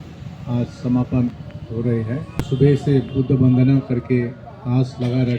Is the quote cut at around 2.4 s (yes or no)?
yes